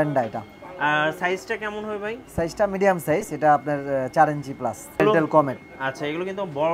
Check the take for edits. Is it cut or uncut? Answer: cut